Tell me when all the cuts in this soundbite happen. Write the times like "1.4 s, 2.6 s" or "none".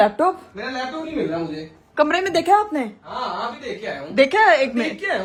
none